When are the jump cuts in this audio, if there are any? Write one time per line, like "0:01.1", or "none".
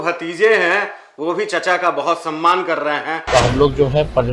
0:03.1